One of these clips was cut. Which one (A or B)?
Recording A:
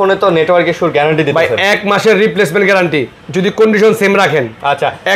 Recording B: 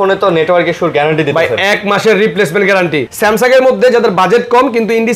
B